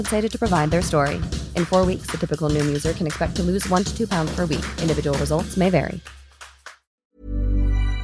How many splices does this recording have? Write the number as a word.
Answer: one